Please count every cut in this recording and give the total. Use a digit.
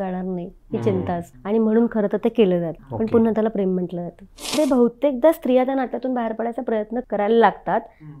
4